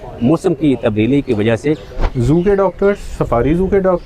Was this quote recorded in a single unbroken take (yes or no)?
no